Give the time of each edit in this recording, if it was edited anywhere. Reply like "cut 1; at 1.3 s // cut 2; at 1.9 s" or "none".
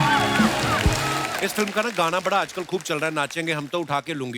cut 1; at 1.2 s